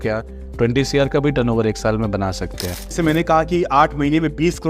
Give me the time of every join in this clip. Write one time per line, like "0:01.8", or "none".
0:02.9